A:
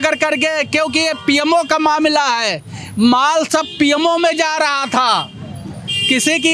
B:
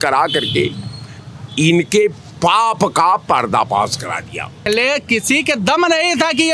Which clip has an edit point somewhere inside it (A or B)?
B